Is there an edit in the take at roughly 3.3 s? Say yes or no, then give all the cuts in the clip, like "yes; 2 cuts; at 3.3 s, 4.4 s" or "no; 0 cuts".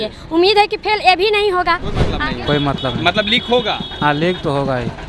no; 1 cut; at 2.1 s